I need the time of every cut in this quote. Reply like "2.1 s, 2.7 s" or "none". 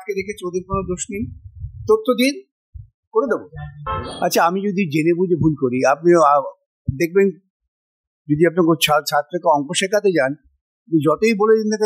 4.0 s

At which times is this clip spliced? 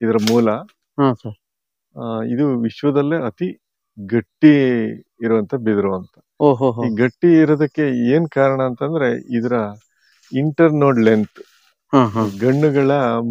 none

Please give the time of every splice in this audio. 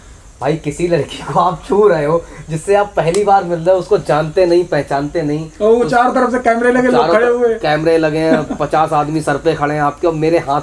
none

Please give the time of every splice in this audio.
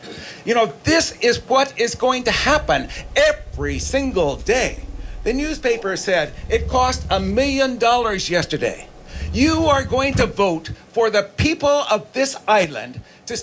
none

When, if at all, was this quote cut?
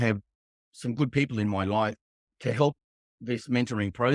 none

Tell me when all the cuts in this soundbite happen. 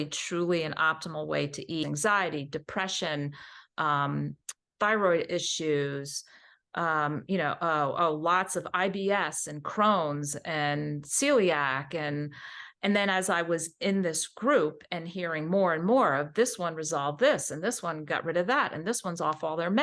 1.8 s

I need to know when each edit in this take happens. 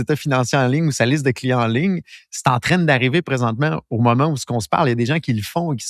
none

